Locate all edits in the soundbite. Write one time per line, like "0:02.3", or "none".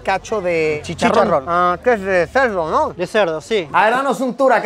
0:00.8
0:03.7